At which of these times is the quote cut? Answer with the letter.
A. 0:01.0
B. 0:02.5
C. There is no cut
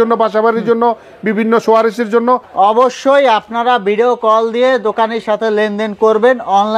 B